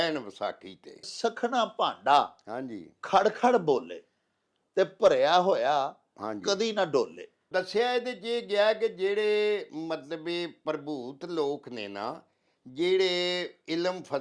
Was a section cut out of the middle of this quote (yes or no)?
yes